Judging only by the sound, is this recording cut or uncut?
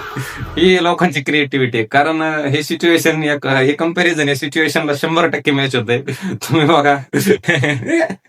uncut